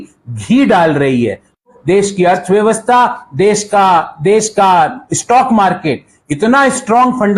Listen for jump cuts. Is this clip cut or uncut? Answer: cut